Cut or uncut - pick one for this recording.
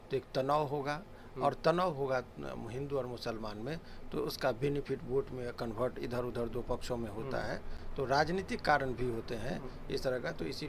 uncut